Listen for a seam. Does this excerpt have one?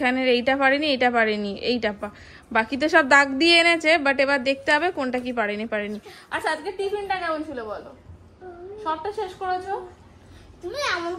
no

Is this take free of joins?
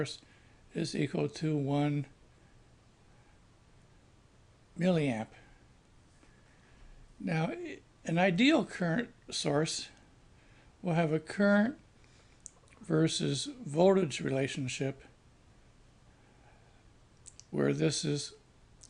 yes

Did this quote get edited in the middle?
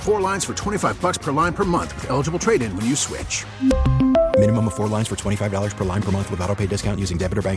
no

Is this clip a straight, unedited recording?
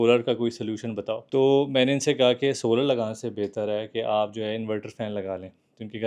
yes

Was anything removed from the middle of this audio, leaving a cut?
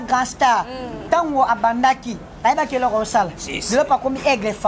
no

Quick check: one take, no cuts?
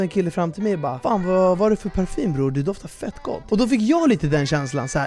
no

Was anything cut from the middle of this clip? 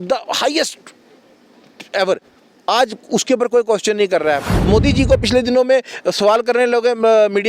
yes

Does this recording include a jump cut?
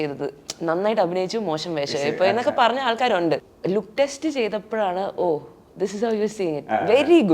yes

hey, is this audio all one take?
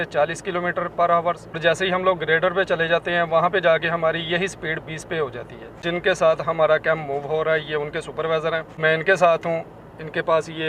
yes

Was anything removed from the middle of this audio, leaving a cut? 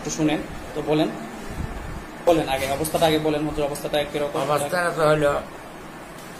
yes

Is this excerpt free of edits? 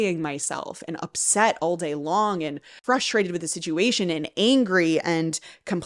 no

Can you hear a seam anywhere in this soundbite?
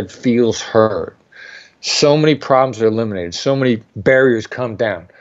yes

